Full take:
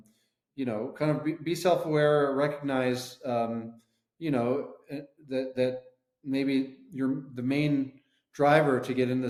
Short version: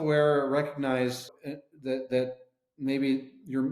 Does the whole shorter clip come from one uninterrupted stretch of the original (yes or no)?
no